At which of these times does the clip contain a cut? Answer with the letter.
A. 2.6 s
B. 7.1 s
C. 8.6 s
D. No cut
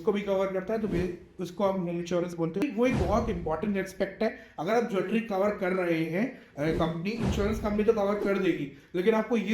A